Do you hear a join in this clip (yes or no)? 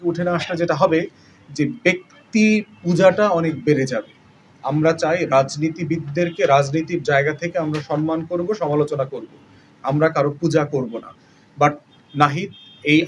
yes